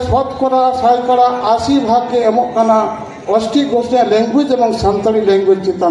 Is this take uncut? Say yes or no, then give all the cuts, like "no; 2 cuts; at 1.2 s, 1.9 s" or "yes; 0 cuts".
yes; 0 cuts